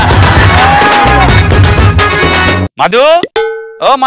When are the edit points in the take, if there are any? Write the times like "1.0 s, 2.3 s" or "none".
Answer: 2.7 s